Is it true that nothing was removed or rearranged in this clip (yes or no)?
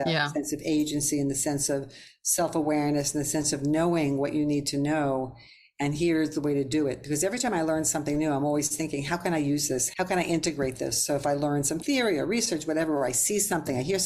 no